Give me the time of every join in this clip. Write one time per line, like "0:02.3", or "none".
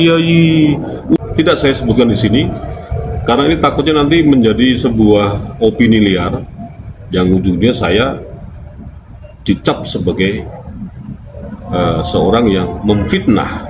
0:01.2